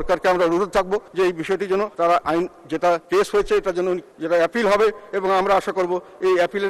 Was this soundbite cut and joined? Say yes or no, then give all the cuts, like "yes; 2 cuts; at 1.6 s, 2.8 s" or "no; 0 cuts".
yes; 4 cuts; at 1.1 s, 1.9 s, 3.0 s, 4.1 s